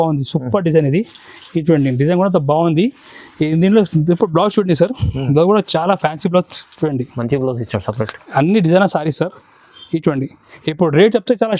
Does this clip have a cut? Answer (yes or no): no